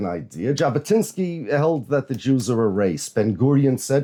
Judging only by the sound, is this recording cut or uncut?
uncut